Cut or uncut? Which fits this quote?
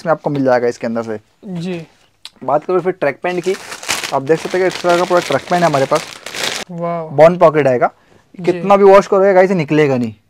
cut